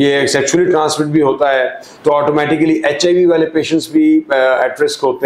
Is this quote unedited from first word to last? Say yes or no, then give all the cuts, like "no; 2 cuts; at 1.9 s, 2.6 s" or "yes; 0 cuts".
yes; 0 cuts